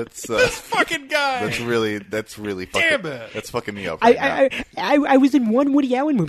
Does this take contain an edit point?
no; 0 cuts

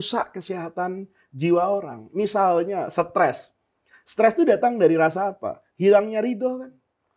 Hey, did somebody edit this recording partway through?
no; 0 cuts

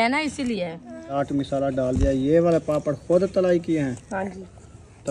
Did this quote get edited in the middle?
yes; 1 cut; at 1.1 s

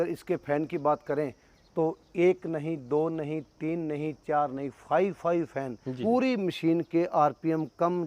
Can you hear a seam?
yes; 1 cut; at 5.9 s

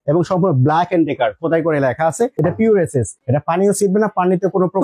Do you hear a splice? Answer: yes; 2 cuts; at 2.3 s, 3.2 s

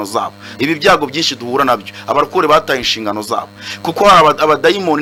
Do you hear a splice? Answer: no; 0 cuts

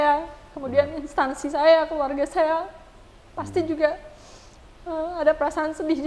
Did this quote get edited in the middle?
no; 0 cuts

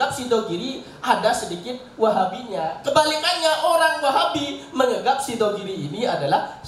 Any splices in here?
no; 0 cuts

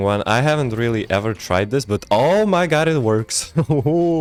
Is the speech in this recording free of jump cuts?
yes; 0 cuts

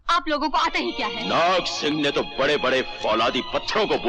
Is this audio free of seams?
no; 1 cut; at 1.1 s

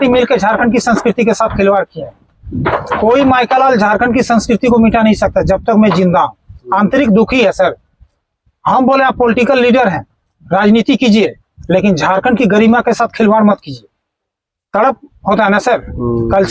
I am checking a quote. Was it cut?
no; 0 cuts

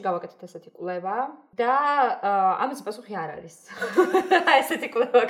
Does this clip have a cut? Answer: yes; 1 cut; at 1.5 s

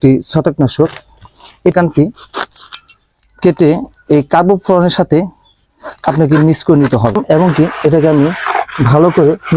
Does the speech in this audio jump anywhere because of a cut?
yes; 2 cuts; at 1.7 s, 7.2 s

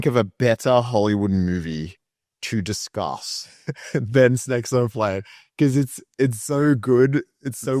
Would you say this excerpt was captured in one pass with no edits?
yes; 0 cuts

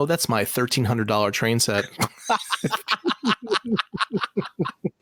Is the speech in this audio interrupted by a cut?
no; 0 cuts

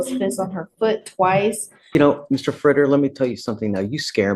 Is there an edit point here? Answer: yes; 1 cut; at 1.9 s

